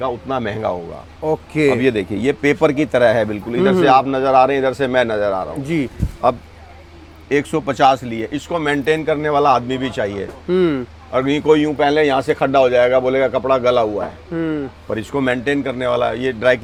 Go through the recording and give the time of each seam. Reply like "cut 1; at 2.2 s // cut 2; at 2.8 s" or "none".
none